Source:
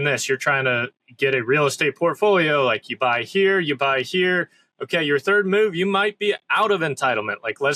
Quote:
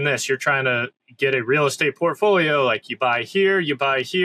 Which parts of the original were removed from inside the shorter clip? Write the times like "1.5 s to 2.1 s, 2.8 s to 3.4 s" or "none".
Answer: none